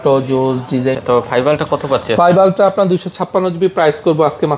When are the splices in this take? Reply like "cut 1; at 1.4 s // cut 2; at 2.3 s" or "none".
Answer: cut 1; at 1.0 s